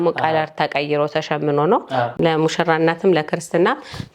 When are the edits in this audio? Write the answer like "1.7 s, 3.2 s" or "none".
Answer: 2.1 s